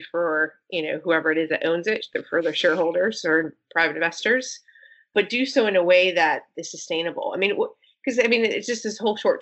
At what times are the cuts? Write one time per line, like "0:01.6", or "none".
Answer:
none

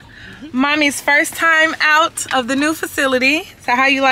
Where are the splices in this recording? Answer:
none

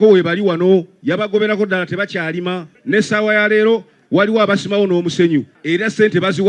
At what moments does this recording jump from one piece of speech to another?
0:02.7
0:05.5

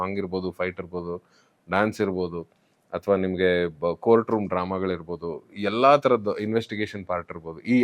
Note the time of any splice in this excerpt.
none

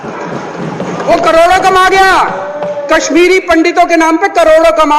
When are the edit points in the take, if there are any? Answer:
0:01.0

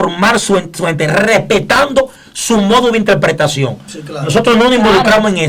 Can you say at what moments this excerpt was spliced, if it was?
none

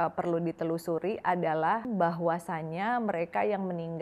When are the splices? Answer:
0:01.9

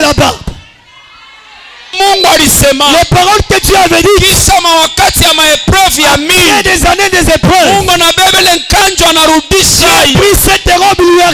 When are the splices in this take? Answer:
0:01.9

